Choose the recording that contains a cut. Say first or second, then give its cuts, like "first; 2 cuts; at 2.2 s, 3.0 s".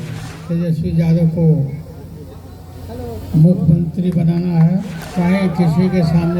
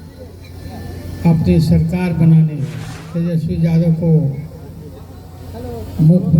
first; 1 cut; at 5.0 s